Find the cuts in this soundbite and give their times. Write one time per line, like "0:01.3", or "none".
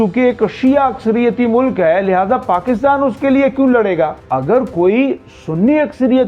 0:04.2